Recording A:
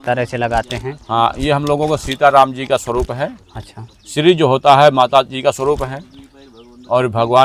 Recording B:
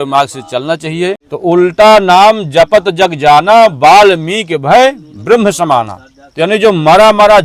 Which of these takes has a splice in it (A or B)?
B